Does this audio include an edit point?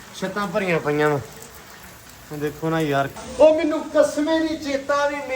yes; 1 cut; at 3.2 s

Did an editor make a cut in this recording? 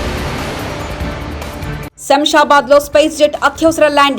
yes; 1 cut; at 1.8 s

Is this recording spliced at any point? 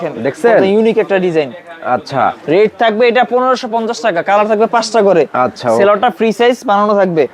no; 0 cuts

